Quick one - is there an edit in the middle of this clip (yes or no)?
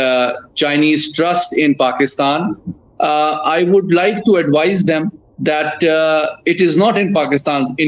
no